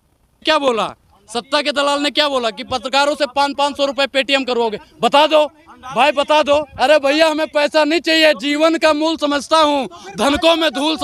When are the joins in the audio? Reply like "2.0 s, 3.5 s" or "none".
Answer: none